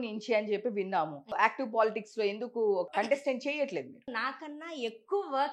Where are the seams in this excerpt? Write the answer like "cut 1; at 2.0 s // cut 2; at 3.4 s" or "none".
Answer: cut 1; at 1.3 s // cut 2; at 2.9 s // cut 3; at 4.1 s